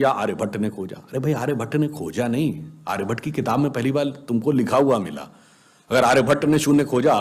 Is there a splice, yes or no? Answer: no